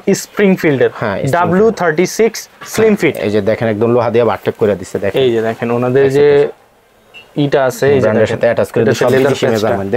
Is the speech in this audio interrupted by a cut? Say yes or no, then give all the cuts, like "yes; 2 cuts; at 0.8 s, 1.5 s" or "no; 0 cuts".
no; 0 cuts